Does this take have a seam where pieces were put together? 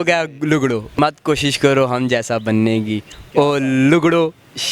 yes; 1 cut; at 1.0 s

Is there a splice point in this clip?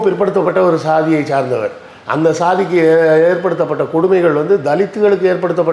no; 0 cuts

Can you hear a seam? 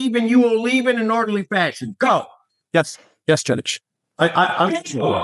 no; 0 cuts

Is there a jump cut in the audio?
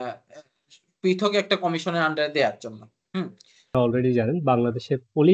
yes; 1 cut; at 3.7 s

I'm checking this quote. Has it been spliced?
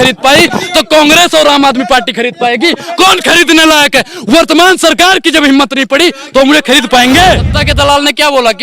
yes; 1 cut; at 7.5 s

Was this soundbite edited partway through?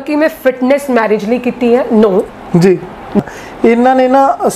yes; 1 cut; at 3.2 s

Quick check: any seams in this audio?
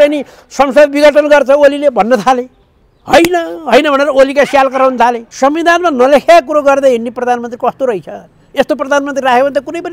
yes; 1 cut; at 5.3 s

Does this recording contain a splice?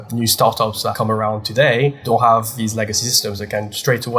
yes; 1 cut; at 2.0 s

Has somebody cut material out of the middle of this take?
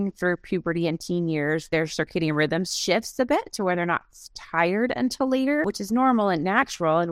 yes; 1 cut; at 5.7 s

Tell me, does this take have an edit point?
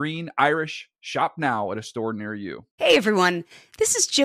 yes; 1 cut; at 2.6 s

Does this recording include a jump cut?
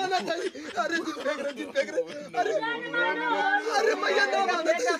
no; 0 cuts

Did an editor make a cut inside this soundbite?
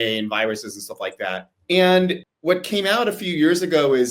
yes; 2 cuts; at 1.5 s, 2.3 s

